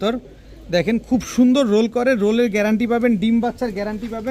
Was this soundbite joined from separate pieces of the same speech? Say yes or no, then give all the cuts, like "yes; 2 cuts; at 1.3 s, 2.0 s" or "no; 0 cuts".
no; 0 cuts